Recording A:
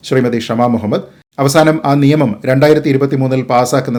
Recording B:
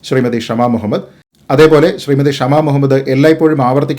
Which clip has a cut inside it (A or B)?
B